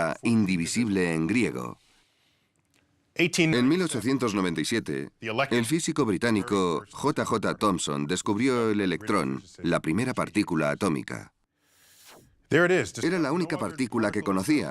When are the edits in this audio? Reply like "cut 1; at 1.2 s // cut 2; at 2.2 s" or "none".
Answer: cut 1; at 11.9 s

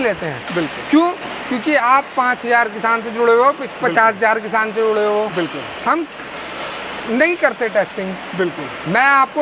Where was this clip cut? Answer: none

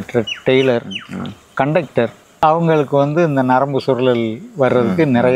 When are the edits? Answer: cut 1; at 2.4 s

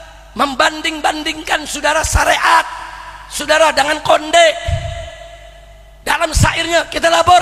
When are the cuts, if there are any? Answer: none

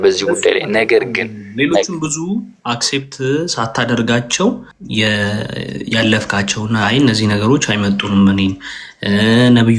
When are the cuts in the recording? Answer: none

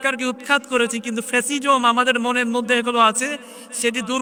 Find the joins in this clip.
none

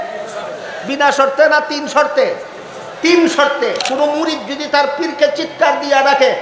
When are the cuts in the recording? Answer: cut 1; at 3.8 s

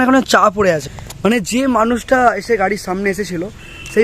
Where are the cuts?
none

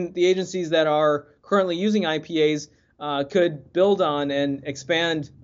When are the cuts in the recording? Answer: none

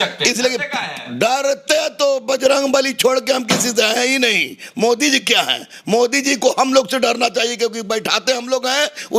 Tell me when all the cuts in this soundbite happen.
none

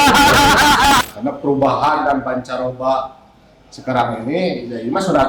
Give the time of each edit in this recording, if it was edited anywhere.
cut 1; at 1.0 s

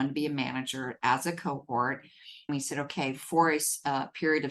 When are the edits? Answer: cut 1; at 2.5 s

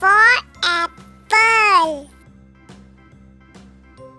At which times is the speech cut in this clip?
none

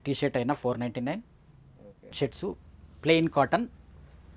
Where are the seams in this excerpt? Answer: cut 1; at 2.1 s

